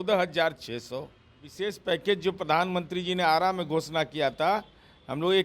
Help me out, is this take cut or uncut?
cut